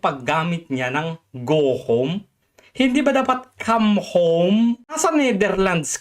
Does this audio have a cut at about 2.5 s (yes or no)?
no